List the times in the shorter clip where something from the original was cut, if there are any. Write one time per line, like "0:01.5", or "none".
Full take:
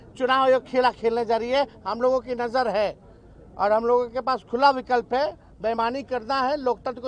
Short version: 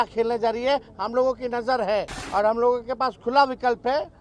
0:02.2